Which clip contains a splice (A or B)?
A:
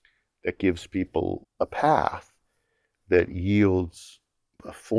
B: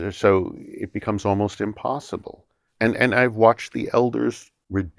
B